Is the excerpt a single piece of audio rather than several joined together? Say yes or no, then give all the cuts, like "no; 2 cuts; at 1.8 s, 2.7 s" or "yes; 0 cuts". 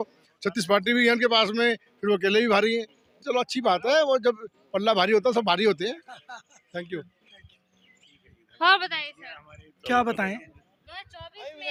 yes; 0 cuts